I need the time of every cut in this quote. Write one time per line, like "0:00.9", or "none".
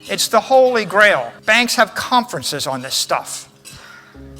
0:01.3